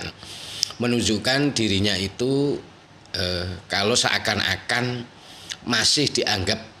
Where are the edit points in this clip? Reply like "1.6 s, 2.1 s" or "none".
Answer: none